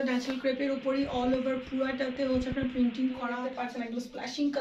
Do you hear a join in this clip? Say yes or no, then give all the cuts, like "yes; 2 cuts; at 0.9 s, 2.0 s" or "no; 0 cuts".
yes; 1 cut; at 3.5 s